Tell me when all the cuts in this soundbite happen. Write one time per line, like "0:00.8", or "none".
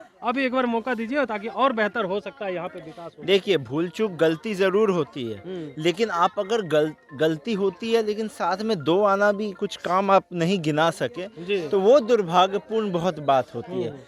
none

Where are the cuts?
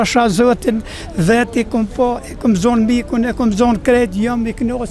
none

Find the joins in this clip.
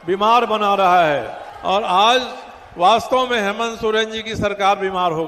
0:01.4

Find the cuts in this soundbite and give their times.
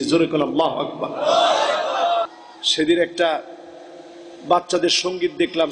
0:02.3

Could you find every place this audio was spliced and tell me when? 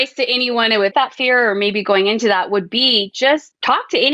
0:00.9

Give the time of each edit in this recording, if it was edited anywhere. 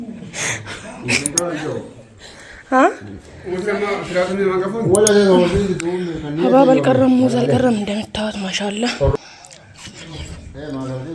none

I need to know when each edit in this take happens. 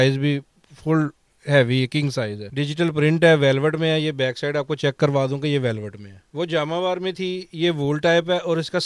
0:02.4
0:06.2

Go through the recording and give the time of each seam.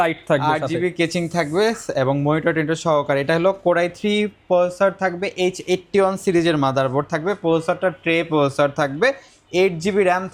none

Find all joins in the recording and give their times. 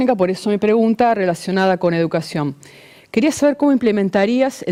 none

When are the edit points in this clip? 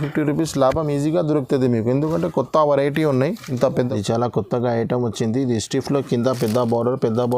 0:03.7

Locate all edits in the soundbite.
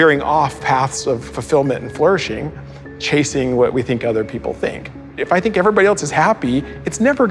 0:01.3
0:05.1

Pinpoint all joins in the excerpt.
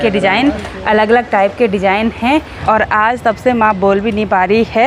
0:02.5

